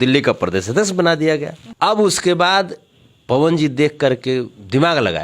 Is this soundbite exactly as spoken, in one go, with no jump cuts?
no; 1 cut; at 1.6 s

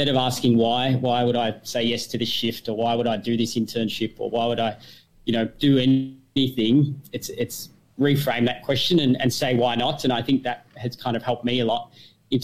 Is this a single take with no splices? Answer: yes; 0 cuts

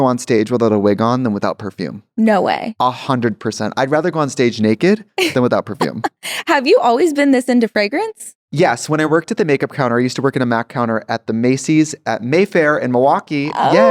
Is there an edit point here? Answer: no; 0 cuts

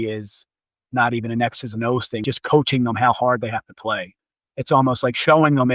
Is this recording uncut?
no; 2 cuts; at 2.2 s, 4.1 s

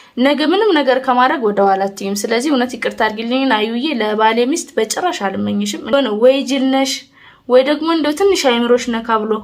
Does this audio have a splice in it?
yes; 1 cut; at 5.9 s

